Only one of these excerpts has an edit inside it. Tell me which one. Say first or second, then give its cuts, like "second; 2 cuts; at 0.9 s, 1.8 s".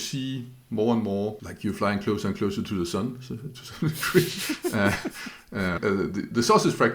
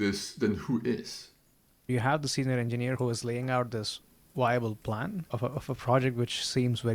second; 2 cuts; at 1.9 s, 3.0 s